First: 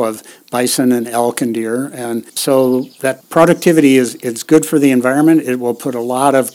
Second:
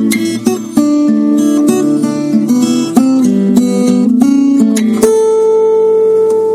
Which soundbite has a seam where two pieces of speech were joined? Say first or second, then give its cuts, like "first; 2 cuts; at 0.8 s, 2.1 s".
first; 2 cuts; at 2.3 s, 3.0 s